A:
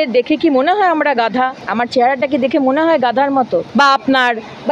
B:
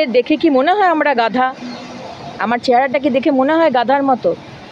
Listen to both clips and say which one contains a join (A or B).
A